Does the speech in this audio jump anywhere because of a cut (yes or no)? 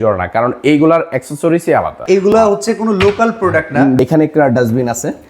yes